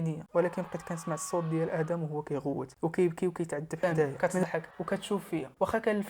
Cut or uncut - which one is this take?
cut